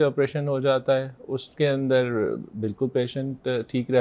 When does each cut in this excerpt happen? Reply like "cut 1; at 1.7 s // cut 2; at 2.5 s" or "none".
none